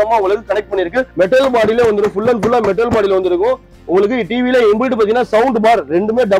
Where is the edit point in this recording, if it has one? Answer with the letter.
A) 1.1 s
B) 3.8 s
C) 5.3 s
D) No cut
A